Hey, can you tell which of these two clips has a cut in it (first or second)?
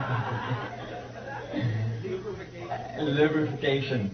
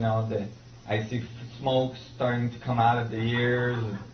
first